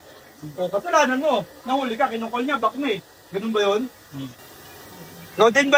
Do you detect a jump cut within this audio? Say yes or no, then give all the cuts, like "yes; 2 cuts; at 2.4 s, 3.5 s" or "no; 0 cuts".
no; 0 cuts